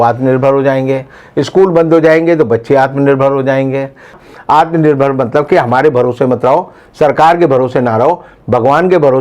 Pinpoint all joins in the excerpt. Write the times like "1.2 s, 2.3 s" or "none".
4.1 s